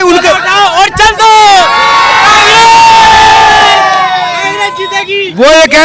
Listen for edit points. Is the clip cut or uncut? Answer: uncut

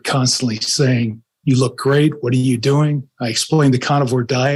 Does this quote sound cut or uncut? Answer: uncut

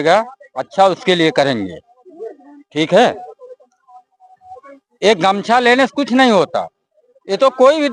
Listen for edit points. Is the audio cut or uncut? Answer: uncut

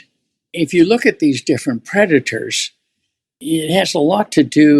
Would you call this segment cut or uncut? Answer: cut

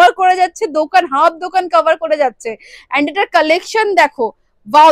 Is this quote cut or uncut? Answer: uncut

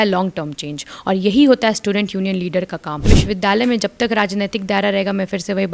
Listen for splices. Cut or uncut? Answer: cut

